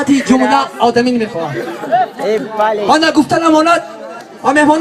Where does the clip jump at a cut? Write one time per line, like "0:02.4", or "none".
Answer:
none